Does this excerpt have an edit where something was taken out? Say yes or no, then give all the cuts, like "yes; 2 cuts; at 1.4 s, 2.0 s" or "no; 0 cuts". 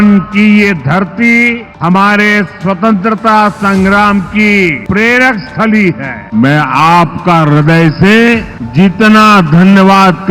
yes; 4 cuts; at 1.7 s, 4.8 s, 6.1 s, 8.6 s